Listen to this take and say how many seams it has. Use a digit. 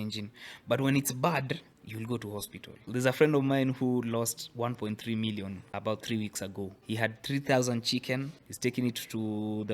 5